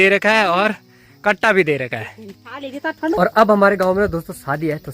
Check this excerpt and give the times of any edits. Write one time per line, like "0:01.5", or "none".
0:03.2